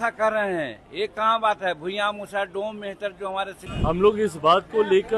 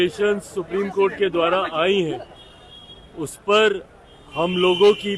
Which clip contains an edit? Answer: first; 1 cut; at 3.6 s

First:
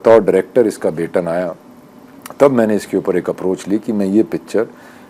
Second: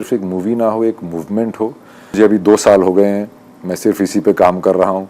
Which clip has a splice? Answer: second; 1 cut; at 2.1 s

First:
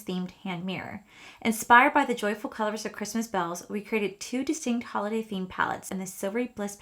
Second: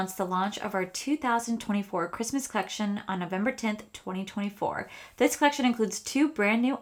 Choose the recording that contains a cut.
first; 1 cut; at 5.9 s

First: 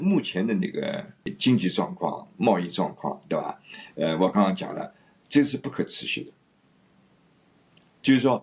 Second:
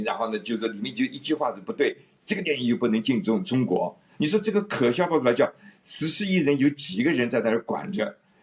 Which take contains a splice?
first; 1 cut; at 1.3 s

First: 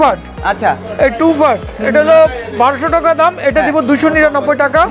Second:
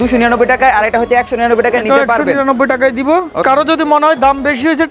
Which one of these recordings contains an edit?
second; 1 cut; at 3.4 s

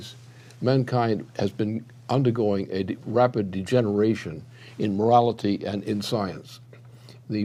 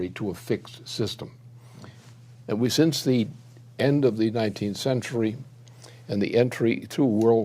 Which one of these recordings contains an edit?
second; 1 cut; at 6.3 s

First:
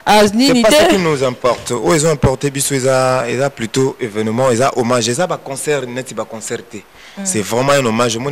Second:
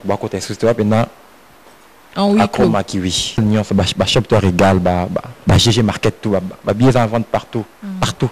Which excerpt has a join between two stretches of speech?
second; 1 cut; at 3.4 s

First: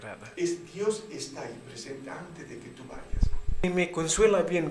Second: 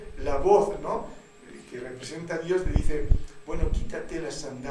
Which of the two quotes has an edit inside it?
first; 1 cut; at 3.6 s

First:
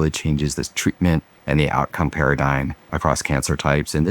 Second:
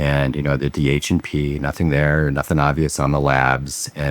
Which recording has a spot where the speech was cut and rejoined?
first; 2 cuts; at 1.3 s, 2.8 s

